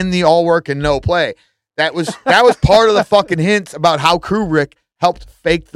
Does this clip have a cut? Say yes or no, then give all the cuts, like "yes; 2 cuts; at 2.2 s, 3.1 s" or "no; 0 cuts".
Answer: no; 0 cuts